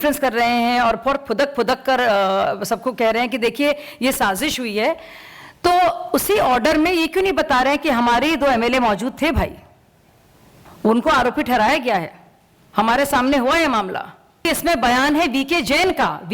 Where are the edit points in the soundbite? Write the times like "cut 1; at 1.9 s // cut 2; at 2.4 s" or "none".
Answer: cut 1; at 14.5 s